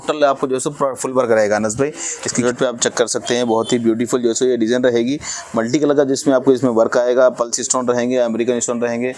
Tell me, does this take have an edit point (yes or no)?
yes